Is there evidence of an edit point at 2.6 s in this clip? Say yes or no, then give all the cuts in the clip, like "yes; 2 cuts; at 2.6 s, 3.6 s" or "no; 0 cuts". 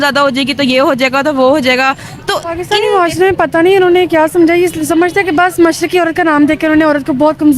yes; 1 cut; at 2.6 s